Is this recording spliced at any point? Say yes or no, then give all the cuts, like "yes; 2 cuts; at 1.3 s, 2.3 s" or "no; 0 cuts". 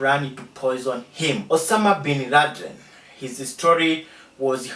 yes; 1 cut; at 1.4 s